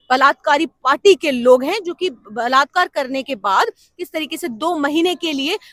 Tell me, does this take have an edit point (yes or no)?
no